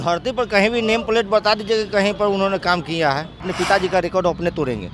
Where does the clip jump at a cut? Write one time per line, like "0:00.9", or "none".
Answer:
0:03.5